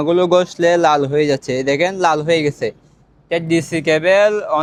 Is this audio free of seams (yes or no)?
yes